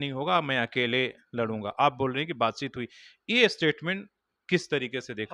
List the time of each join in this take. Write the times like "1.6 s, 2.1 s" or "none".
none